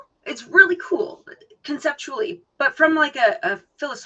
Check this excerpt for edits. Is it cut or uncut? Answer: cut